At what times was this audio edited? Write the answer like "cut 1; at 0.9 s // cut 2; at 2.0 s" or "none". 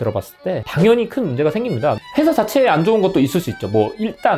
cut 1; at 2.0 s